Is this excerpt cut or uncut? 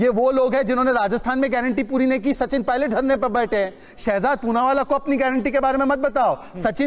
uncut